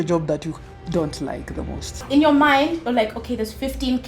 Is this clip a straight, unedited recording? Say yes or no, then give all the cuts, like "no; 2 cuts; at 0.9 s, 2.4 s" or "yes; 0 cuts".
no; 1 cut; at 2.0 s